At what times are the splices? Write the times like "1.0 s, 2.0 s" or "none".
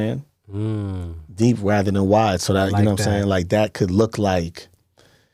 none